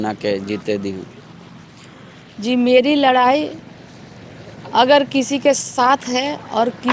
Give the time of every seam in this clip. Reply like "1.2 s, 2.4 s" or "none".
none

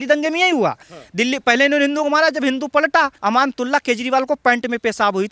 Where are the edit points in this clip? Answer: 3.1 s

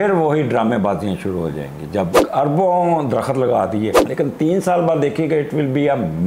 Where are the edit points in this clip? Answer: 2.2 s, 4.0 s

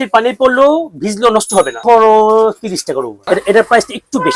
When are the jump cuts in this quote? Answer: 1.8 s, 3.2 s

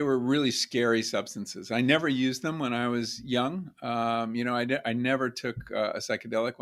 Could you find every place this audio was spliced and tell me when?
none

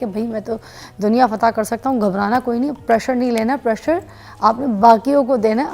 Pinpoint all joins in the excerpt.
none

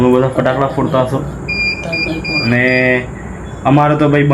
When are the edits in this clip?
none

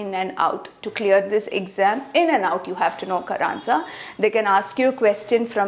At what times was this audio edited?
none

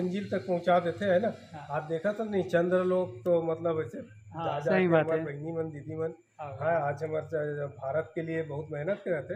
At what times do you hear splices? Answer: none

